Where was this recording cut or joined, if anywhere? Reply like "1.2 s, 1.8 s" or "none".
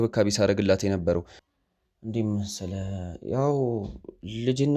1.4 s